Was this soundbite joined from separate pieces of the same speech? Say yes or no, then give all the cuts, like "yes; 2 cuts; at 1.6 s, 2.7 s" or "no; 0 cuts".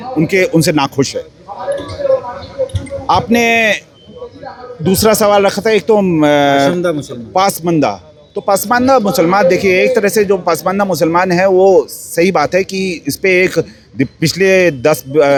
no; 0 cuts